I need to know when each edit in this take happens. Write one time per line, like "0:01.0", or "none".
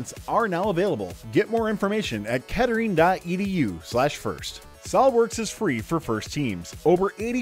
0:04.7